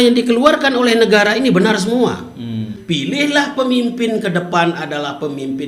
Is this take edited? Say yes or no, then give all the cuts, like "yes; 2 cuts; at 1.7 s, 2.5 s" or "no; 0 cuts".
yes; 1 cut; at 2.8 s